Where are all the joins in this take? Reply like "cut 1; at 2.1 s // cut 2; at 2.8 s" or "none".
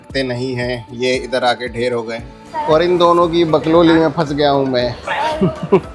cut 1; at 2.6 s